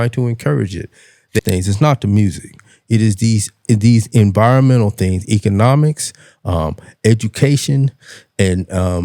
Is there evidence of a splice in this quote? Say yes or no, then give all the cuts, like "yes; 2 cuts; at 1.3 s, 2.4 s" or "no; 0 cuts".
yes; 1 cut; at 1.4 s